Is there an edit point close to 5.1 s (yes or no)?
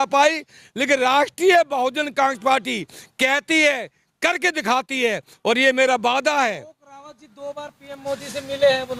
no